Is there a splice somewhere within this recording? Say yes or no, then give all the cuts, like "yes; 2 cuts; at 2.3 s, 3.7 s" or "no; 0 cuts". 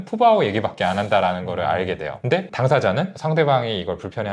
no; 0 cuts